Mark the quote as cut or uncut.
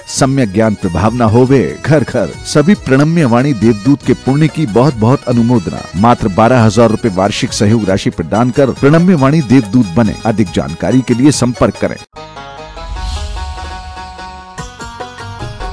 cut